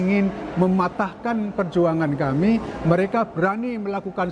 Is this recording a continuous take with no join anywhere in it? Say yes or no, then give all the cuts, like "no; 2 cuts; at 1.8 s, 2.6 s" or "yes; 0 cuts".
yes; 0 cuts